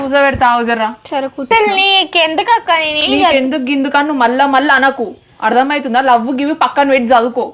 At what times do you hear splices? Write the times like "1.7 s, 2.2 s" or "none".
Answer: 1.5 s